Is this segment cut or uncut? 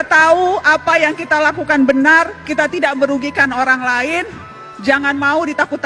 uncut